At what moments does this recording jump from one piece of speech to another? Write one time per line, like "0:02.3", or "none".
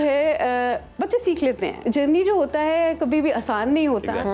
0:01.8